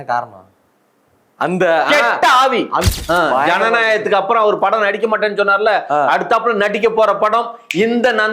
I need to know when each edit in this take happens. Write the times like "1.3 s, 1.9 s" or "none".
2.8 s